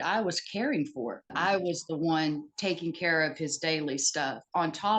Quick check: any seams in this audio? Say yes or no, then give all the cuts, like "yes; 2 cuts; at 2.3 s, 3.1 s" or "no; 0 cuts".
yes; 1 cut; at 1.3 s